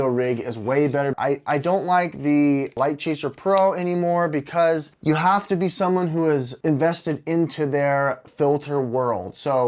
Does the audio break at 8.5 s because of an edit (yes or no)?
no